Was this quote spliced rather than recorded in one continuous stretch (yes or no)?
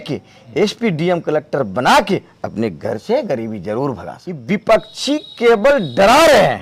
yes